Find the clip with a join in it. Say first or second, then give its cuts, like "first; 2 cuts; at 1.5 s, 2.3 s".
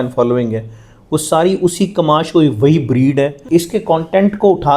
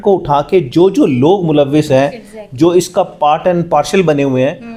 first; 1 cut; at 3.4 s